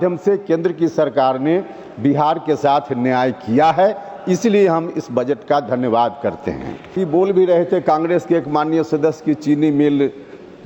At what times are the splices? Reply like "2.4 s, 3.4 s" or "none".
6.9 s